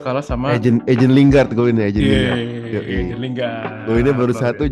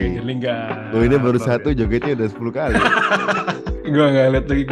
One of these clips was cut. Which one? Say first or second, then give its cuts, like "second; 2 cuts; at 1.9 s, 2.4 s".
second; 1 cut; at 3.7 s